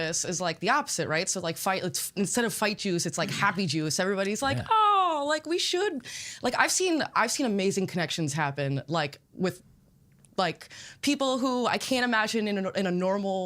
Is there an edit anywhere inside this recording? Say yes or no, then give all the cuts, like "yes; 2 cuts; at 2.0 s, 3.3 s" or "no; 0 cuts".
no; 0 cuts